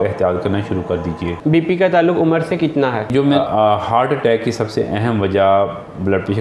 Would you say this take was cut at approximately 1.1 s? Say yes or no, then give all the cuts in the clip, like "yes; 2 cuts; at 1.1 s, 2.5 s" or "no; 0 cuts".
no; 1 cut; at 3.4 s